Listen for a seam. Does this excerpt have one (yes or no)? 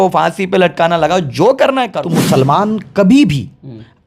yes